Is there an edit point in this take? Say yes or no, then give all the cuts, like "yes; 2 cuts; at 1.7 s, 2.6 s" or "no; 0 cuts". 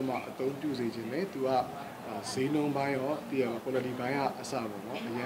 no; 0 cuts